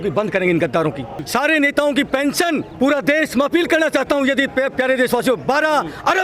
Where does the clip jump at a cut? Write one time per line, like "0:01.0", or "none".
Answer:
0:01.1
0:02.7